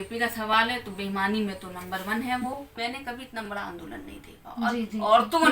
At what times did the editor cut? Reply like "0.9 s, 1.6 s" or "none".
2.7 s